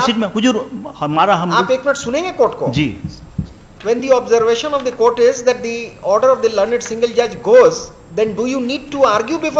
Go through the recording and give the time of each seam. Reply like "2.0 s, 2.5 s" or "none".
none